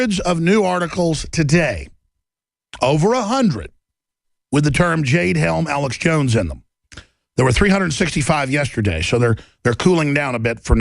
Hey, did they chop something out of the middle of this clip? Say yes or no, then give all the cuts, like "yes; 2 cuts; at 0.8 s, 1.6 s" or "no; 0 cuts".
yes; 1 cut; at 7.2 s